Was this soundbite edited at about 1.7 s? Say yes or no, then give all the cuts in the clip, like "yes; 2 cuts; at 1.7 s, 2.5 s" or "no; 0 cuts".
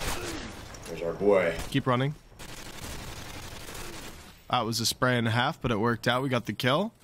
yes; 1 cut; at 1.7 s